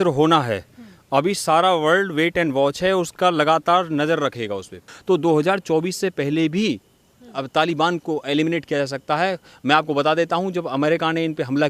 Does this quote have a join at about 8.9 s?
no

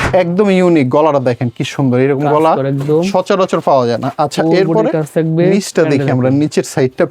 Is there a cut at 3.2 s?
no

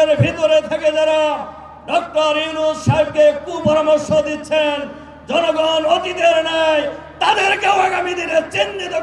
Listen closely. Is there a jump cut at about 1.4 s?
no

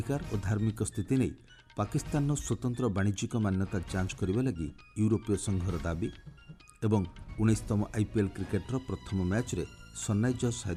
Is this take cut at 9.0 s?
no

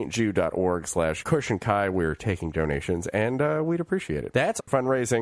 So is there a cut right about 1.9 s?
yes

